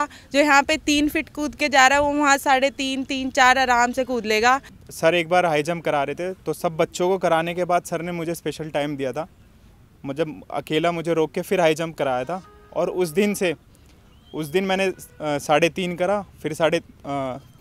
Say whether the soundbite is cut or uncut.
cut